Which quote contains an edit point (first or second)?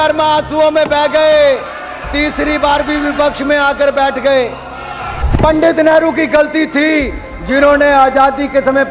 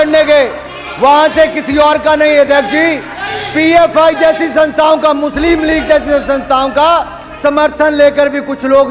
first